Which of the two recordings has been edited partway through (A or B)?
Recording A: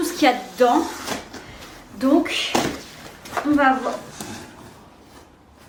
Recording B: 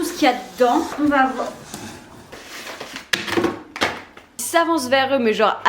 B